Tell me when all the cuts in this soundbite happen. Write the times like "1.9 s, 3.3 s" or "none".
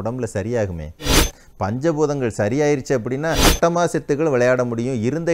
3.5 s